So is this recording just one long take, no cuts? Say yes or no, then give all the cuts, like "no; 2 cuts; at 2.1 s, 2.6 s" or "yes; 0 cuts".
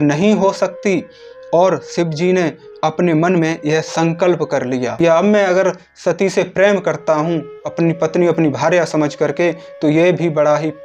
no; 1 cut; at 4.9 s